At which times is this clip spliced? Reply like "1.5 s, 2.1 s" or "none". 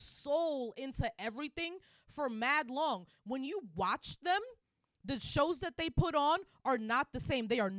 none